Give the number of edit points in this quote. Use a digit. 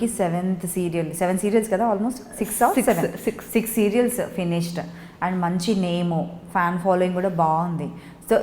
0